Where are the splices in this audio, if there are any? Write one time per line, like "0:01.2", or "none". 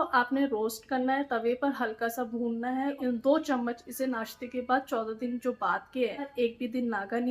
0:02.9
0:06.3